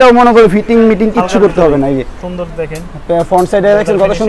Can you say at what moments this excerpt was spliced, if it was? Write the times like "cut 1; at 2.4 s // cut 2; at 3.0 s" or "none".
none